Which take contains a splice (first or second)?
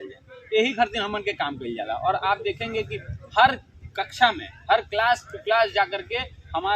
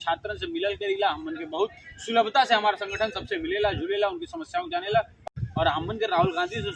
second